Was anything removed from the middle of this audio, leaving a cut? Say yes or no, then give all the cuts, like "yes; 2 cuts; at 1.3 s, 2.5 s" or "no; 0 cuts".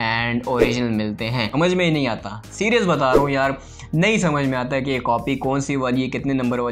yes; 1 cut; at 1.5 s